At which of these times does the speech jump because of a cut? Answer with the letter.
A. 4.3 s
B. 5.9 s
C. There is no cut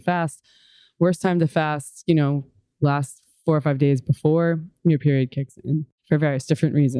B